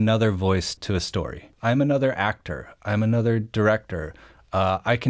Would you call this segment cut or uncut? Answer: cut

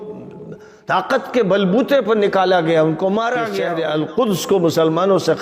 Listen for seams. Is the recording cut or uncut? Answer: cut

